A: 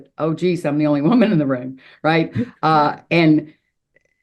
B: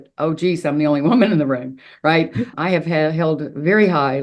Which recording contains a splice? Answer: B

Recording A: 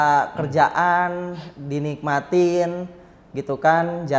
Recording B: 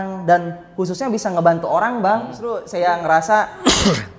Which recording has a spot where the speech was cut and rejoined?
B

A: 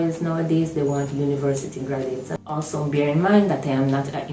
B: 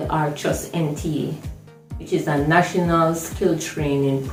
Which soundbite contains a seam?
A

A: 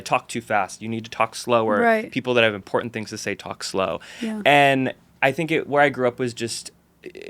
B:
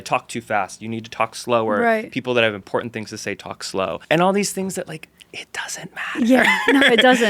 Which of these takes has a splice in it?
B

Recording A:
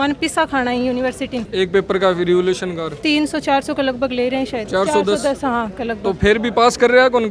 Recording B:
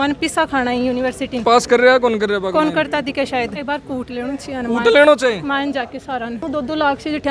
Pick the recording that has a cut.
B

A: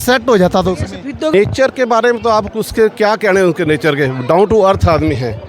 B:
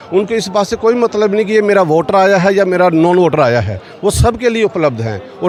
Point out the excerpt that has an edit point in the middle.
A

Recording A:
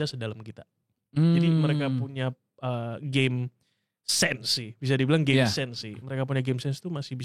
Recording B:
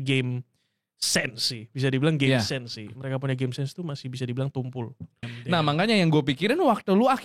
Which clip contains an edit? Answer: B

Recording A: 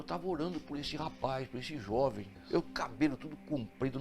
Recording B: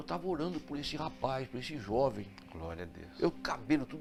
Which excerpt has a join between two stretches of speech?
A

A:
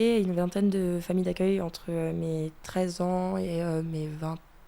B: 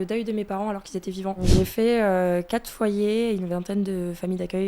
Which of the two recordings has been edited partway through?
B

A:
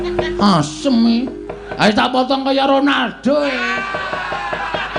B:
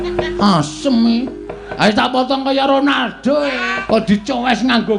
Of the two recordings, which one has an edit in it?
B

